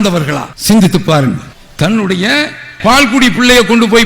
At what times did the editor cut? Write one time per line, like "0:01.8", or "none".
0:01.5